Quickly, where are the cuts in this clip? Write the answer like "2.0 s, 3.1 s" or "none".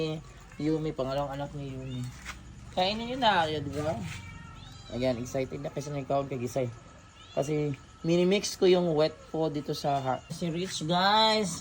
10.3 s